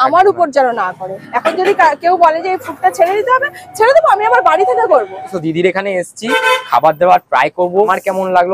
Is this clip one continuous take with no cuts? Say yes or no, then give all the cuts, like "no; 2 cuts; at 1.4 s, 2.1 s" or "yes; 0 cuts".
yes; 0 cuts